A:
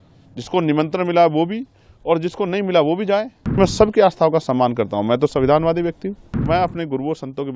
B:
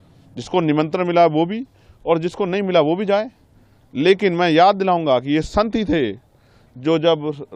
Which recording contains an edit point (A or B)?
A